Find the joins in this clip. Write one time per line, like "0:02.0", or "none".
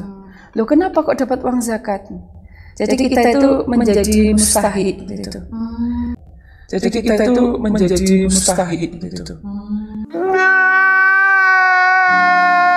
none